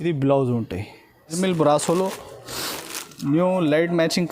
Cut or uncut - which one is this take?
cut